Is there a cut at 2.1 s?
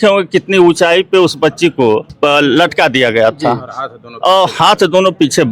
yes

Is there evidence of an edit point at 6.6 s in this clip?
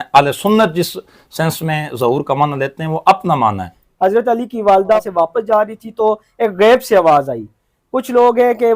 no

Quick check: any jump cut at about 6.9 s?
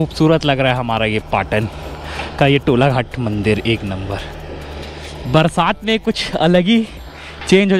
no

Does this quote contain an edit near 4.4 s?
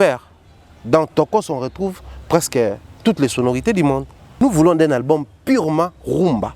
yes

